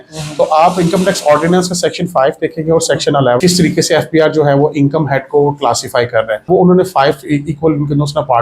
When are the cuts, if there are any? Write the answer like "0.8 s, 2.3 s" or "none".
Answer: 3.4 s, 6.5 s